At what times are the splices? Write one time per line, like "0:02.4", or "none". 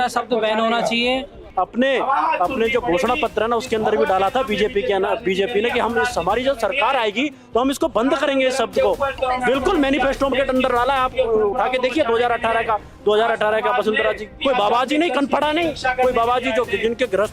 0:01.4
0:09.1
0:14.3